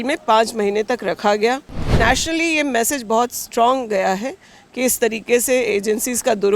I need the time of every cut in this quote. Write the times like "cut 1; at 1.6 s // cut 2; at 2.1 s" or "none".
cut 1; at 2.0 s